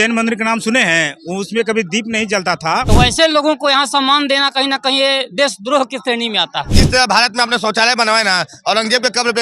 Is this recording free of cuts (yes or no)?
no